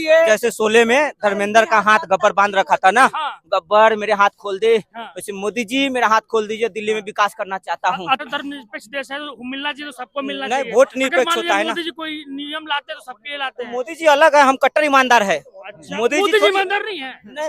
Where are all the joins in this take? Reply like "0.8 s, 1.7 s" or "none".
8.2 s